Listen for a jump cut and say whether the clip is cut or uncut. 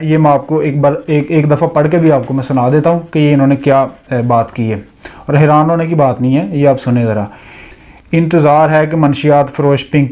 uncut